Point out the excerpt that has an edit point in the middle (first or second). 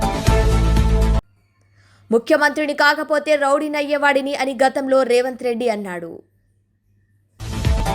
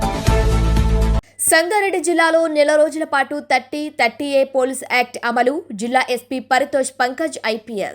second